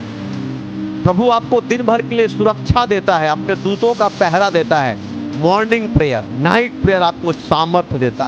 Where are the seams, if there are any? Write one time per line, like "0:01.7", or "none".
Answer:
0:06.3